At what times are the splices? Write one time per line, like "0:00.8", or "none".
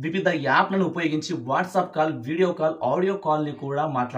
none